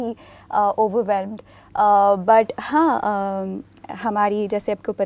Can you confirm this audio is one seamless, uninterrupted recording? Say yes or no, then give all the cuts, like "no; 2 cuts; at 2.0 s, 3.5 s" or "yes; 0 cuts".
yes; 0 cuts